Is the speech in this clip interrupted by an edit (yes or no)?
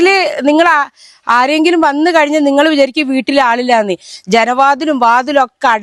no